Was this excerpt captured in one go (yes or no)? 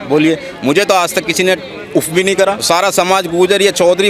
no